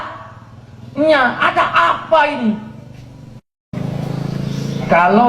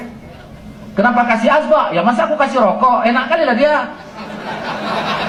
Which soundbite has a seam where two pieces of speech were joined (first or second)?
first